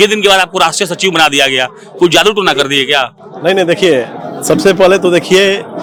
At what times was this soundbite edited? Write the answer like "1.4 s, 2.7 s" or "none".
none